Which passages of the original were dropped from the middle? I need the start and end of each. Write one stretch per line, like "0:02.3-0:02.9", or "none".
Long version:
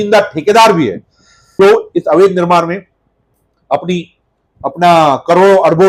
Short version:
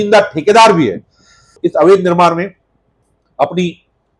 0:01.5-0:01.8